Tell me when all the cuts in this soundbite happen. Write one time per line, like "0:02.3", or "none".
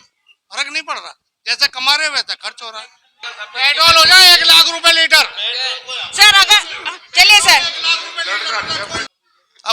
0:03.2
0:09.0